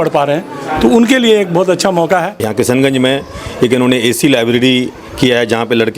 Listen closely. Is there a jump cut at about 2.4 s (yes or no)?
yes